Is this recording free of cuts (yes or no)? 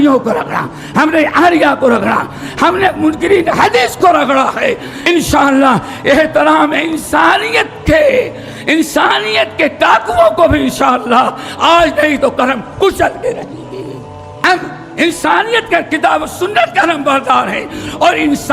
no